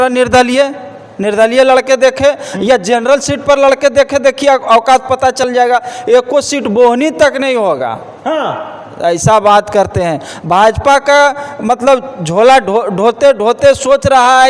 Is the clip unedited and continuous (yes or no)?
yes